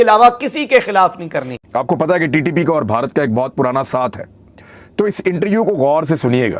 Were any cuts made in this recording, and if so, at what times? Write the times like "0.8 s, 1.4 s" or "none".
1.7 s